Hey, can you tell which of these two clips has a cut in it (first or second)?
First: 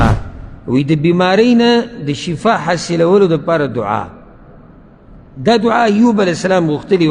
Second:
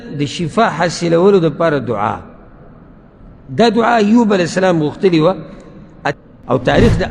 second